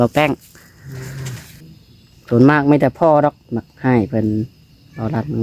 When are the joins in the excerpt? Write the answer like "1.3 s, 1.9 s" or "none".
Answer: 1.6 s